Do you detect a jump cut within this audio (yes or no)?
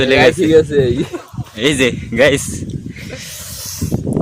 no